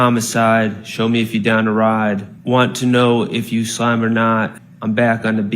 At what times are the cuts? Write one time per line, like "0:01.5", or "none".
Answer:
0:02.3
0:04.7